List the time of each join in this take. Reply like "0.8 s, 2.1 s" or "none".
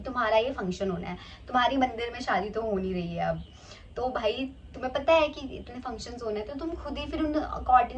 none